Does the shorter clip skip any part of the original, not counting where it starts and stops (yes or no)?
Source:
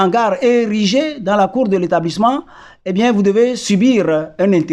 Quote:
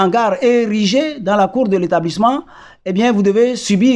no